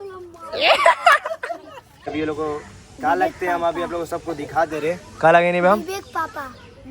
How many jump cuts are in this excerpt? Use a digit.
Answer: 1